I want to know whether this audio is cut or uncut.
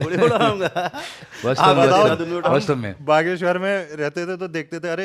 uncut